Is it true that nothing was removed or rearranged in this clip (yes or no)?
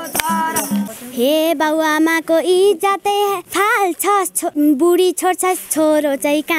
no